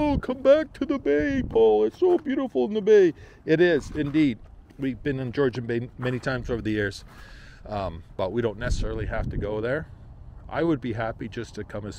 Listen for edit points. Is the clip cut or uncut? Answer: uncut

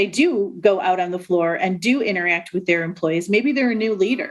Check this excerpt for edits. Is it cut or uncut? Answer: uncut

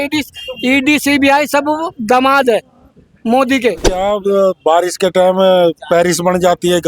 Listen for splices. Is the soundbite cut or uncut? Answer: cut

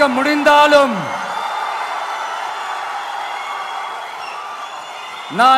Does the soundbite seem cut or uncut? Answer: uncut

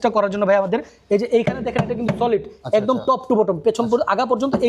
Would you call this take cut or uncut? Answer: uncut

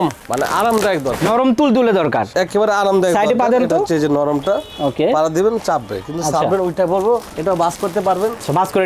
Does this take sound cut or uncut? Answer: uncut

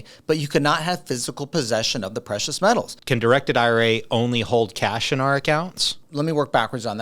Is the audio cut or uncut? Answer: cut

